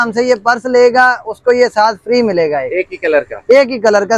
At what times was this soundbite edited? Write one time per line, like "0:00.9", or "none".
none